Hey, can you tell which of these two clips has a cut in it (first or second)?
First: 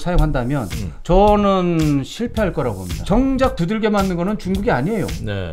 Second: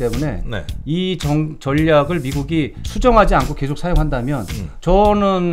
first